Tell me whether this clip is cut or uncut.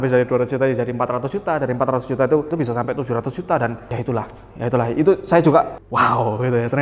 cut